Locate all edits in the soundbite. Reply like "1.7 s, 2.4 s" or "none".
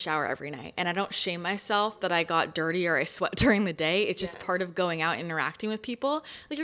none